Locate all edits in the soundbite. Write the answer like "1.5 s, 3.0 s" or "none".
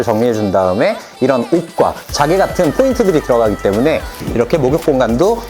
4.2 s